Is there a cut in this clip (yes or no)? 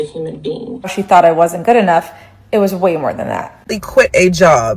yes